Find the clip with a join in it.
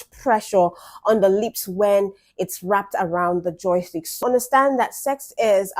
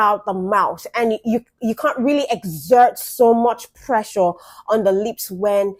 first; 1 cut; at 4.2 s

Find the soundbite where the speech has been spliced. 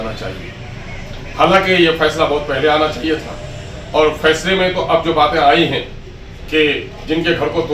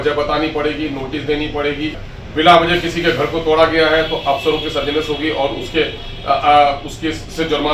second; 1 cut; at 2.0 s

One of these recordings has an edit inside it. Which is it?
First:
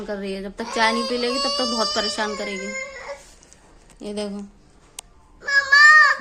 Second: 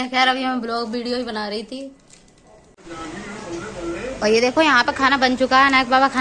second; 1 cut; at 2.7 s

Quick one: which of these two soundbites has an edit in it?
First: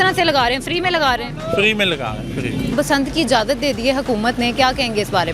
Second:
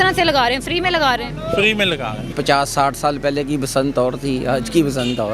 second; 1 cut; at 2.3 s

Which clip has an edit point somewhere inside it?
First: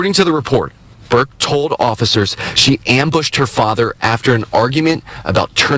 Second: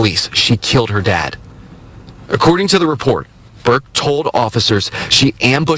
first; 1 cut; at 4.9 s

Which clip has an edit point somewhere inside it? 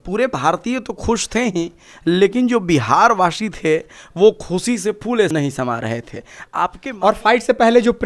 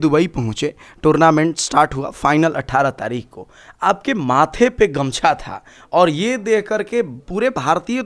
first; 2 cuts; at 5.3 s, 6.8 s

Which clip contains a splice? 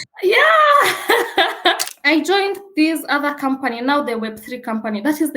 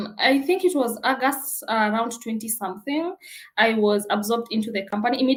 first; 1 cut; at 1.8 s

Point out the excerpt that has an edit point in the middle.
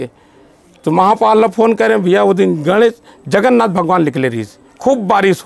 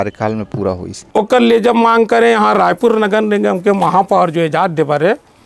second; 1 cut; at 0.9 s

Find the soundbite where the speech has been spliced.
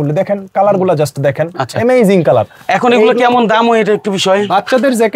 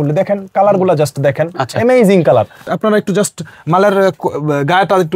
second; 1 cut; at 2.6 s

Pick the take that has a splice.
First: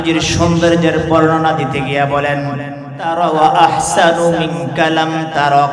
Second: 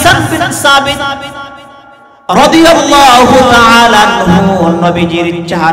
first; 1 cut; at 3.1 s

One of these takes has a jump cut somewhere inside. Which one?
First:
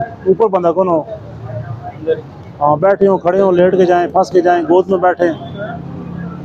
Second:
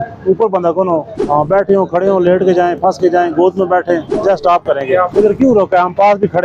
second; 3 cuts; at 1.1 s, 4.1 s, 5.1 s

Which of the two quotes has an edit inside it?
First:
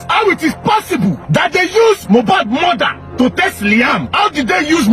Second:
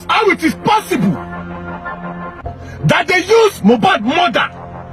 first; 3 cuts; at 1.2 s, 3.0 s, 4.1 s

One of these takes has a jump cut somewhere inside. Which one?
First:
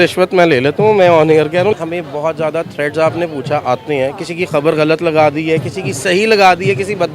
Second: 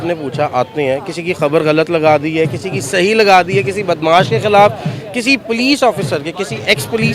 first; 1 cut; at 1.7 s

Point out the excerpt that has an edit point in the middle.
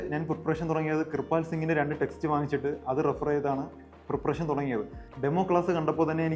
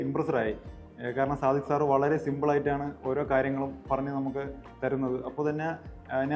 first; 1 cut; at 5.0 s

